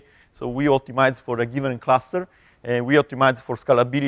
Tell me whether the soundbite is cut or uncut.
cut